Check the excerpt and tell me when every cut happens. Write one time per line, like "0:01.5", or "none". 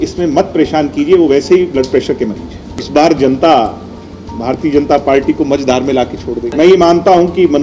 0:02.5
0:06.5